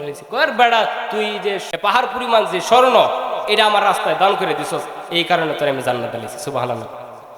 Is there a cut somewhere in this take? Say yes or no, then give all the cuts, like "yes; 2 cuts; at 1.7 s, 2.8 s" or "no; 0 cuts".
yes; 1 cut; at 1.7 s